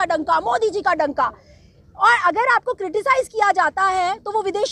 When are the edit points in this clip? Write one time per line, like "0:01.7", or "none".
none